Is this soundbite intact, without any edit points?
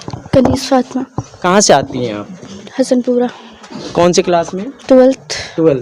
yes; 0 cuts

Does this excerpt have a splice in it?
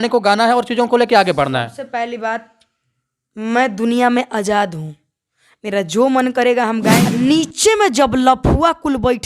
yes; 1 cut; at 7.0 s

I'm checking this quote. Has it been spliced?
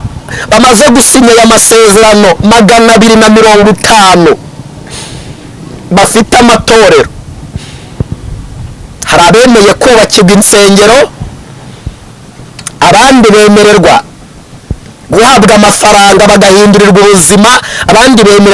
no; 0 cuts

